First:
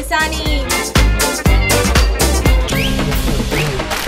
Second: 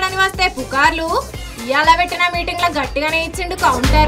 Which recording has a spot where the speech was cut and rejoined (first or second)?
first